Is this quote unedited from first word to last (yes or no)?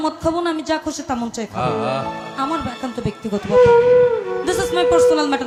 yes